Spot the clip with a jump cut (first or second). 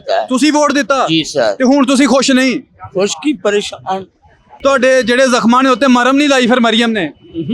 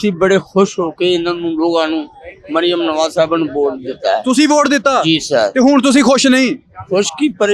first